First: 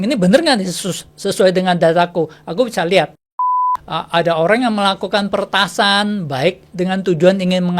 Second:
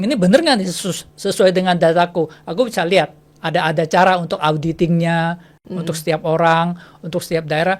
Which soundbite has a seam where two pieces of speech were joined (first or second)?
first